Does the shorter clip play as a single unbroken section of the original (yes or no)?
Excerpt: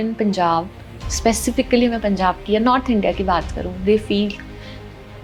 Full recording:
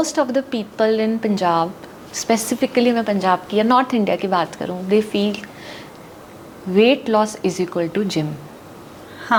yes